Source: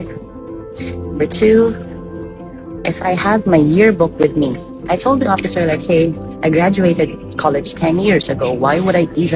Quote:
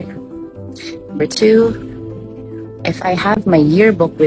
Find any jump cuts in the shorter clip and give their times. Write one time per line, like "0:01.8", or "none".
none